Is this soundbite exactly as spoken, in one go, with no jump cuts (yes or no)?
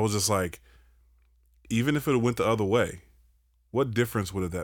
yes